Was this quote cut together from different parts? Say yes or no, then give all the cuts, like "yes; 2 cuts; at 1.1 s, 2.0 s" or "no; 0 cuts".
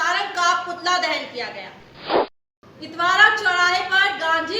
yes; 1 cut; at 2.4 s